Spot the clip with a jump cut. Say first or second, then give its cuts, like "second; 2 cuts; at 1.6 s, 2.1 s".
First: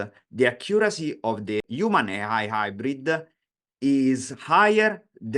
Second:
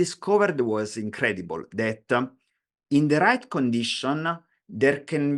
first; 1 cut; at 1.7 s